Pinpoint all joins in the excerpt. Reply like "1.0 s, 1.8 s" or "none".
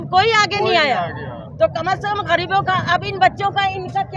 none